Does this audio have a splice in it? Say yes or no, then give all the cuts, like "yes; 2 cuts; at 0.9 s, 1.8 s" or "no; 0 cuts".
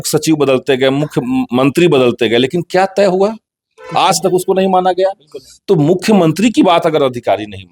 no; 0 cuts